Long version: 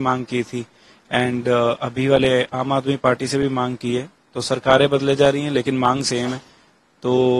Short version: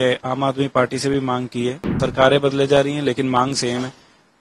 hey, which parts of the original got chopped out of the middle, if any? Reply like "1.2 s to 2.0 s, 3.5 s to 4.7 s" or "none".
4.1 s to 4.3 s